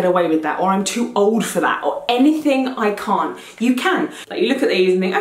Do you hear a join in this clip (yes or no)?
yes